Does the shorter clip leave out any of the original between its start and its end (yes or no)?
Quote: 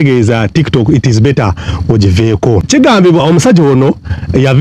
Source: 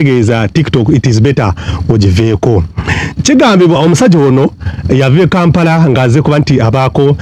yes